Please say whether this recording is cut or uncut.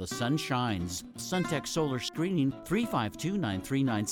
cut